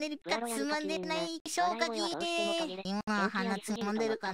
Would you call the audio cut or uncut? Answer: cut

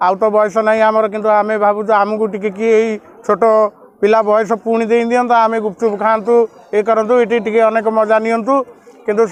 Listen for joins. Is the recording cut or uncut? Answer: uncut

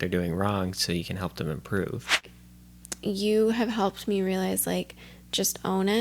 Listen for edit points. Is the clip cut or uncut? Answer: cut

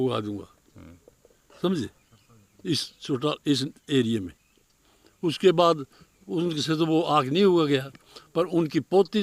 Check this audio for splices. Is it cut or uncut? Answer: uncut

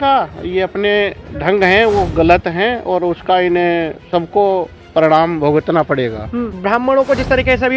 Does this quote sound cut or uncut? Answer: cut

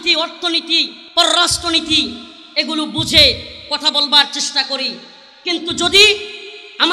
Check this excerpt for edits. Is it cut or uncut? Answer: cut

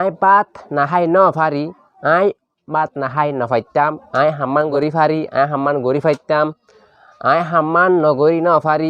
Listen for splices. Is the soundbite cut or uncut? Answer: cut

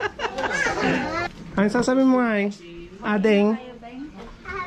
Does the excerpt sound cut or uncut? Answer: cut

